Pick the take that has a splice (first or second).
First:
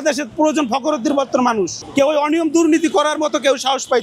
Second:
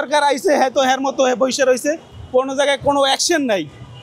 first